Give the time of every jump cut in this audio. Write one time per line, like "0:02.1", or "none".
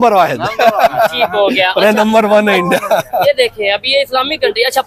none